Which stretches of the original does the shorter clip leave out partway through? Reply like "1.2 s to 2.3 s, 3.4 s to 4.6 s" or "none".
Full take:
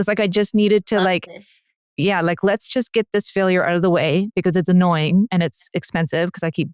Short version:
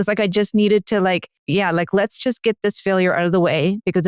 1.3 s to 1.8 s